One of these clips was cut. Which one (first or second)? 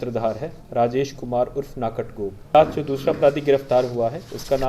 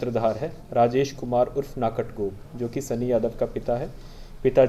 first